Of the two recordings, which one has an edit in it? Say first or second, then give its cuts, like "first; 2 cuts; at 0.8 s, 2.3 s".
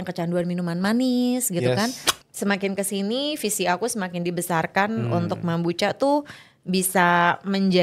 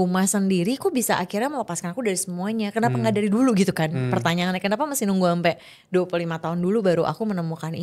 first; 1 cut; at 2.1 s